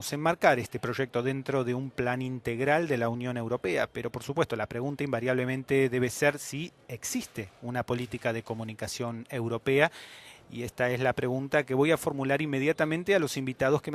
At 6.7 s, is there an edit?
no; 1 cut; at 1.8 s

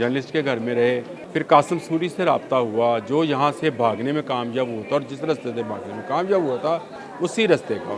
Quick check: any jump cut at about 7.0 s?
yes; 2 cuts; at 1.2 s, 7.0 s

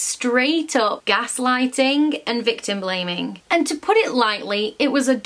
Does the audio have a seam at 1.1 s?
no; 1 cut; at 3.3 s

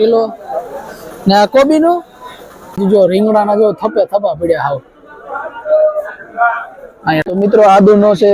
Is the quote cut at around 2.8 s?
yes; 2 cuts; at 2.8 s, 7.2 s

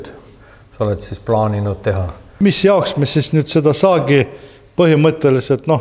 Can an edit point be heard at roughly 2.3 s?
yes; 1 cut; at 2.3 s

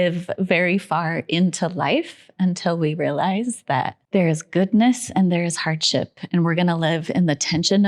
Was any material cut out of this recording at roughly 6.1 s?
no; 1 cut; at 4.0 s

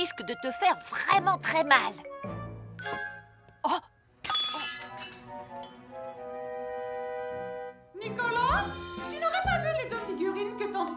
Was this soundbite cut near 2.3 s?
no; 0 cuts

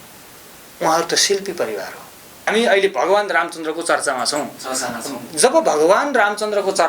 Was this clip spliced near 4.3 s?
no; 1 cut; at 2.5 s

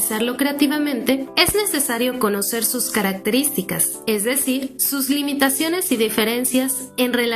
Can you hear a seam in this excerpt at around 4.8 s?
yes; 3 cuts; at 1.3 s, 3.9 s, 4.8 s

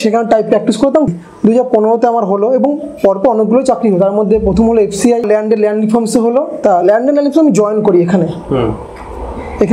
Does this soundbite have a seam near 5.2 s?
yes; 3 cuts; at 1.1 s, 5.2 s, 6.5 s

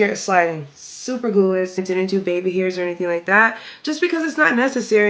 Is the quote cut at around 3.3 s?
no; 1 cut; at 1.8 s

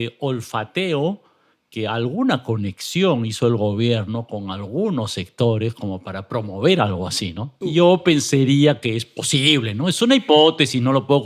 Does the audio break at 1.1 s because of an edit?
no; 1 cut; at 7.5 s

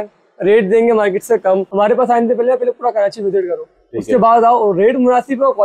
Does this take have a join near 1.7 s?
yes; 1 cut; at 1.7 s

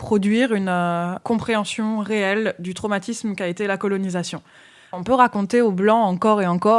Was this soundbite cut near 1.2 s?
yes; 2 cuts; at 1.2 s, 5.0 s

